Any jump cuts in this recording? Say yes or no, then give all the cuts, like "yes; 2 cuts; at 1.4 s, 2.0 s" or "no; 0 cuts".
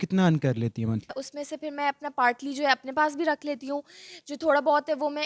yes; 1 cut; at 1.1 s